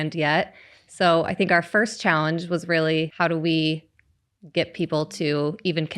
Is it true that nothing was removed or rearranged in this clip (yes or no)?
no